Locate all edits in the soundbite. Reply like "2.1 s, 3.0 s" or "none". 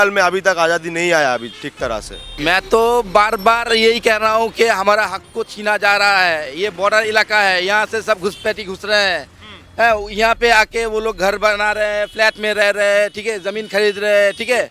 2.3 s